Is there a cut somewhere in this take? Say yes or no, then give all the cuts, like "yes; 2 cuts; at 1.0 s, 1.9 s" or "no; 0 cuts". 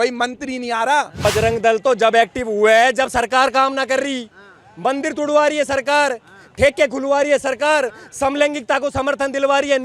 yes; 1 cut; at 1.2 s